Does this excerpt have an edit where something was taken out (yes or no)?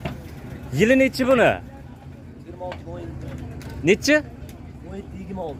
no